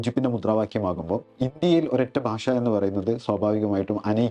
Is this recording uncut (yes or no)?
no